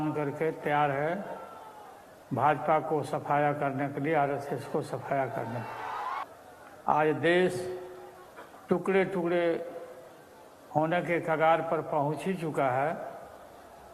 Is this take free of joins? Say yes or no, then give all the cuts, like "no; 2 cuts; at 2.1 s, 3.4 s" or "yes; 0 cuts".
no; 1 cut; at 6.2 s